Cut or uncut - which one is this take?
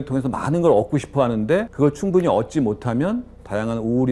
cut